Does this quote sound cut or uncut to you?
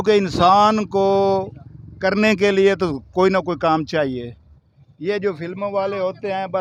uncut